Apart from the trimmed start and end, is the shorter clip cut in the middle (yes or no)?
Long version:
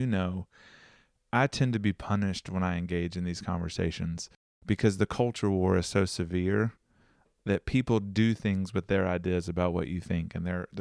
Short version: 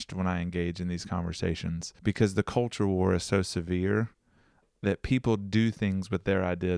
yes